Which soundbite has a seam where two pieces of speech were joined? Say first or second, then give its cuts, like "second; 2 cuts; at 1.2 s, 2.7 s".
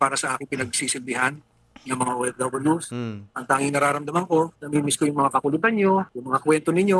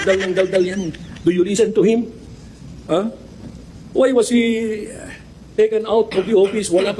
first; 2 cuts; at 4.6 s, 6.2 s